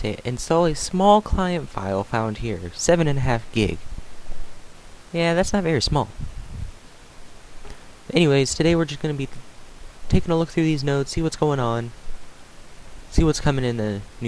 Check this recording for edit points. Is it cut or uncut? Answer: cut